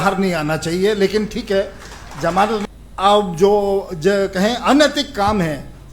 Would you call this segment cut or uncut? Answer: cut